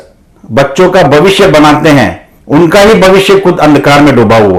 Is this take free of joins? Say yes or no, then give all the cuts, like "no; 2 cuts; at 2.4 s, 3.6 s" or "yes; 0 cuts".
yes; 0 cuts